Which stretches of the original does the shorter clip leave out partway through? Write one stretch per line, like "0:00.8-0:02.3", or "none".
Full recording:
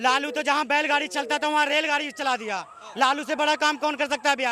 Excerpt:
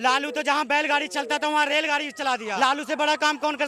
0:02.6-0:03.0